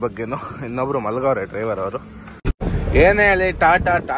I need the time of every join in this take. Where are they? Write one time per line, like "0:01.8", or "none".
0:02.5